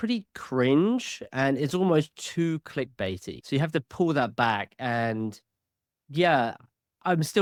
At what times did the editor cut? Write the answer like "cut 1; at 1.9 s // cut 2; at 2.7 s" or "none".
none